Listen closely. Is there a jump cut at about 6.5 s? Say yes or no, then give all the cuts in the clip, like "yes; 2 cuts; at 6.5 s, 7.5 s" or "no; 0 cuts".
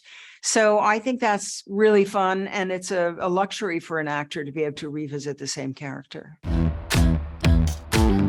yes; 1 cut; at 6.5 s